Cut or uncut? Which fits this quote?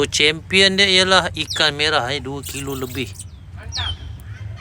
uncut